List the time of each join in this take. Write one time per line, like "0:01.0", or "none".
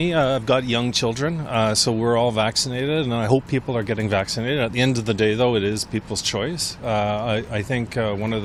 none